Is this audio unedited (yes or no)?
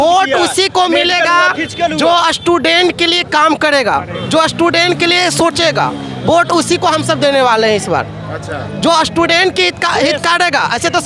yes